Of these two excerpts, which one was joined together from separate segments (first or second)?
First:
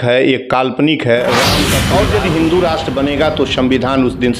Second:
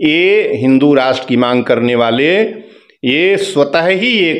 first